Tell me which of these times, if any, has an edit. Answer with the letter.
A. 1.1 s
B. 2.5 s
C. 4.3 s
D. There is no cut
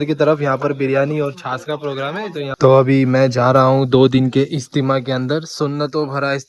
B